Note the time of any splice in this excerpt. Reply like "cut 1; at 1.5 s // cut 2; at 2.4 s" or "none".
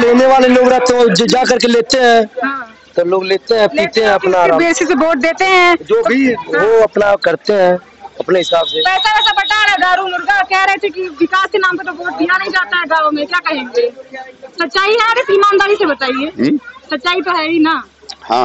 none